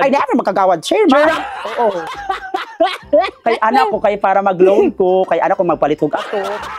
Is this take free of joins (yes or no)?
yes